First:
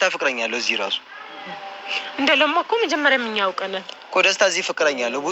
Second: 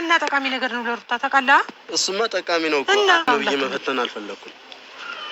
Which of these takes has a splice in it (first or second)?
second